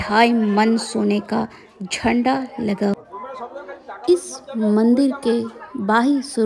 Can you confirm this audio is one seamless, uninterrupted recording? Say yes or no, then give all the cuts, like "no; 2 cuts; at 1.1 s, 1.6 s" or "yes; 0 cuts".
yes; 0 cuts